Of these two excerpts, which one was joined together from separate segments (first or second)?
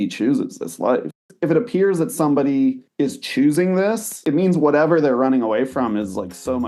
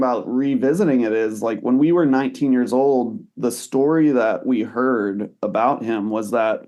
first